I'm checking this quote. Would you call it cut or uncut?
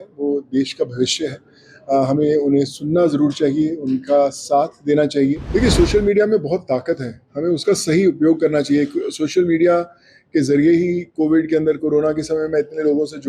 cut